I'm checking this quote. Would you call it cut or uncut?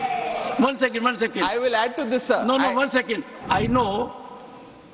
cut